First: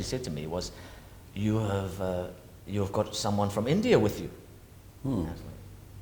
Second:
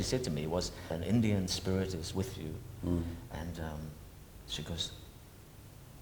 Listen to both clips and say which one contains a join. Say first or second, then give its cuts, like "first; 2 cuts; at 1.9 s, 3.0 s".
second; 1 cut; at 0.9 s